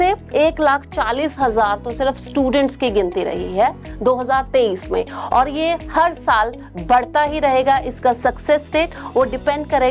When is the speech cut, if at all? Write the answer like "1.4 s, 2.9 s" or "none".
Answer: none